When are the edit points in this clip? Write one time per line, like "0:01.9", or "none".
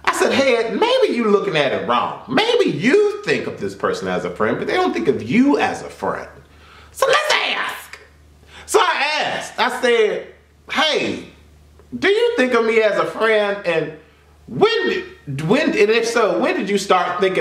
none